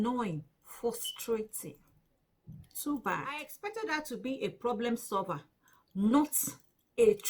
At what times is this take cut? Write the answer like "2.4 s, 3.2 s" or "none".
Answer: 3.5 s